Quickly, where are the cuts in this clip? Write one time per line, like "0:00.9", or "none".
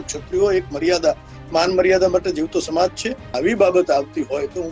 0:03.4